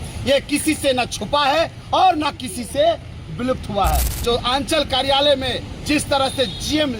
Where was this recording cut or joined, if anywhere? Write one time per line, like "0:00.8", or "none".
0:04.2

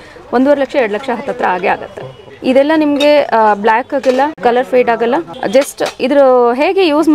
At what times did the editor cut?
0:02.2
0:04.3
0:05.3

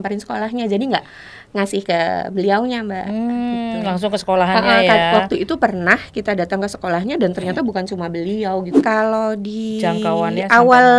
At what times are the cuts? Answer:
0:08.8

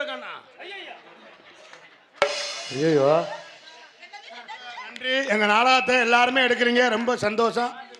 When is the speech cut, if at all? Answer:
0:04.8

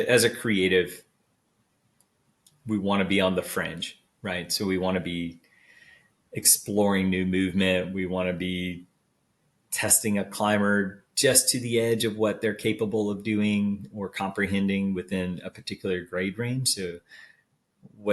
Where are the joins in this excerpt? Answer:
none

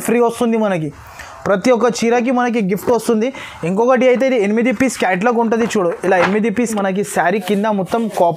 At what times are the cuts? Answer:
0:06.7

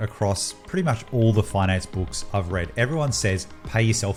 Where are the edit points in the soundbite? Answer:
none

